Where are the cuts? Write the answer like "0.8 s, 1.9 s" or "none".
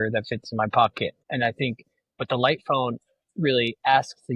1.2 s